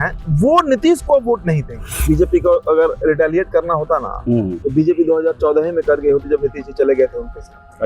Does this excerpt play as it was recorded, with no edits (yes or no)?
no